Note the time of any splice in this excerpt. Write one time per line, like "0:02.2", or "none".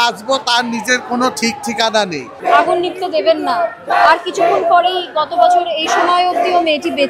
0:02.3